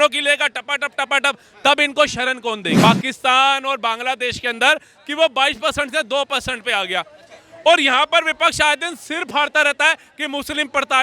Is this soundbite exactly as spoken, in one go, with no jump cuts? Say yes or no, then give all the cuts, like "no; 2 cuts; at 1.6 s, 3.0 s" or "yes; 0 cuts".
no; 1 cut; at 2.8 s